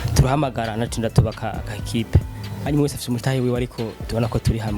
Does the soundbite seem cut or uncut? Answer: cut